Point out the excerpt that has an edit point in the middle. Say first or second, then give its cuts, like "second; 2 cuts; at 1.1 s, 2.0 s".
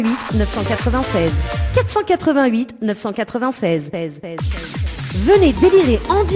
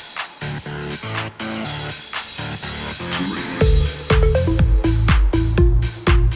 second; 1 cut; at 5.2 s